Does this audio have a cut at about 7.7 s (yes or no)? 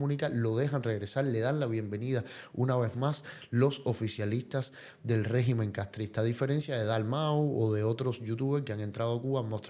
no